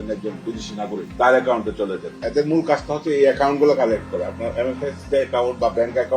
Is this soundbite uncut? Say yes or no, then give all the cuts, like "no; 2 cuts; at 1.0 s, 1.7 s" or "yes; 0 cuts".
no; 1 cut; at 2.2 s